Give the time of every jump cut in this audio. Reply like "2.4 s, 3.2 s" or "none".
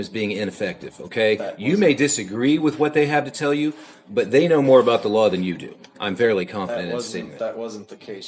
none